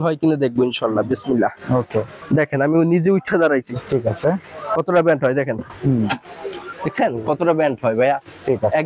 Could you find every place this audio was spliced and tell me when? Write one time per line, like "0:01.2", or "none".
0:02.2

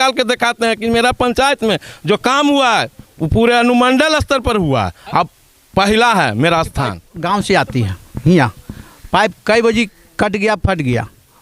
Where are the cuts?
0:06.7

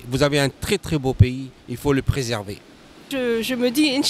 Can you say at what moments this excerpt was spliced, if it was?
0:03.1

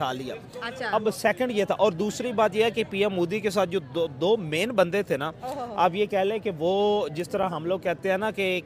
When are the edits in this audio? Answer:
none

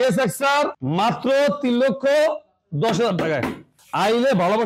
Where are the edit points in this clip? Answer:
none

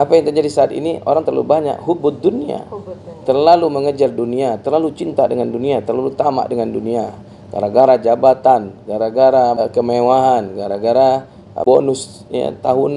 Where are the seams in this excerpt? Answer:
0:09.6
0:11.6

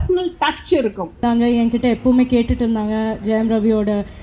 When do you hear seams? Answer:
0:01.2

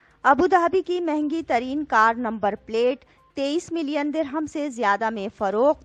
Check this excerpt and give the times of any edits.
none

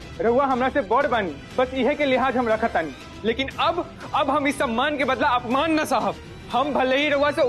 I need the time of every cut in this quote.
0:01.4
0:03.1
0:06.3

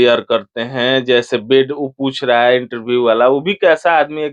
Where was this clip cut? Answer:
none

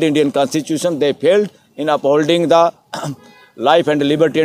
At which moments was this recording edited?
none

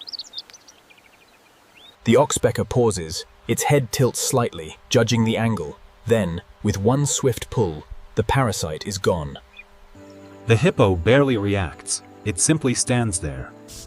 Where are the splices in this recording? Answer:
none

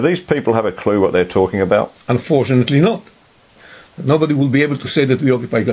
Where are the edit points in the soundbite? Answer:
0:02.0
0:03.5

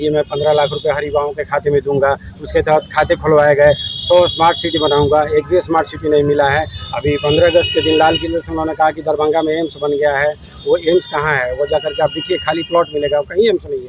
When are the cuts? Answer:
none

